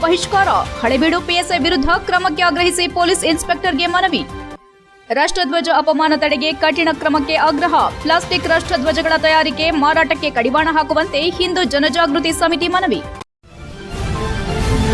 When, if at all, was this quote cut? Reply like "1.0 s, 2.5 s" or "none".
13.1 s